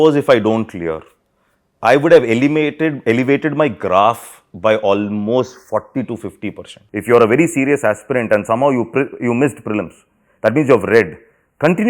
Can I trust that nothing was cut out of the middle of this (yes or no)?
no